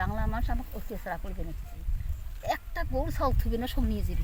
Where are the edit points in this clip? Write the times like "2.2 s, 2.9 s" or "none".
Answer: none